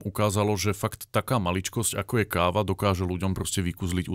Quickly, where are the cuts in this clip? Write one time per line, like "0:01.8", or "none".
none